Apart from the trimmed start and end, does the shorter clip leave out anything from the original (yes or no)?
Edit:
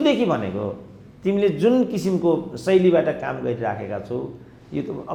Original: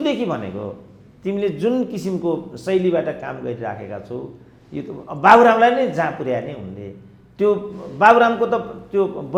no